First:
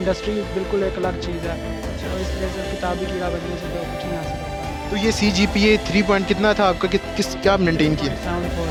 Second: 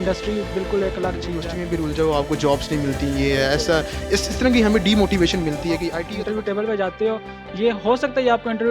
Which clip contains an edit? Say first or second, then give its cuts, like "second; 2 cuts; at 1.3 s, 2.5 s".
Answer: second; 2 cuts; at 1.5 s, 6.0 s